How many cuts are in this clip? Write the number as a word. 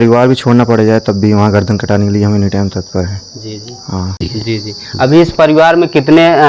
one